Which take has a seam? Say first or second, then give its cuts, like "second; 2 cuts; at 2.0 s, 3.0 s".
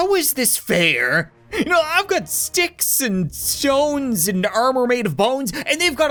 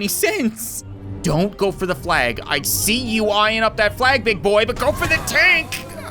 second; 1 cut; at 1.1 s